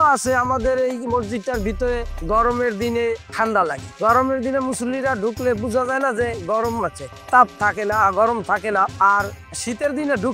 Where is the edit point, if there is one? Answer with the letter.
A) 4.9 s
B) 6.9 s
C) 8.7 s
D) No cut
D